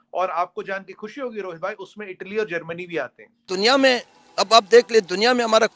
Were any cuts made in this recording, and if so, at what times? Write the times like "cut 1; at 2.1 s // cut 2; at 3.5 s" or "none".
cut 1; at 3.5 s